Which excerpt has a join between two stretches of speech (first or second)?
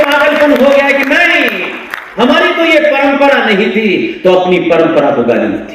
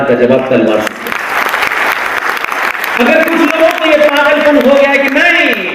second